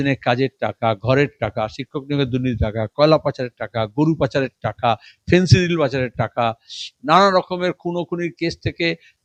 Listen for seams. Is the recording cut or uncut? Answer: uncut